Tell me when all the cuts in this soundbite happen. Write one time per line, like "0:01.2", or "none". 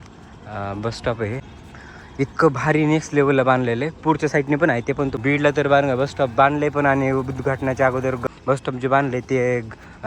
0:01.4
0:05.1
0:08.2